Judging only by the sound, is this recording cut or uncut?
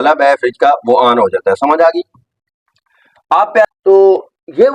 cut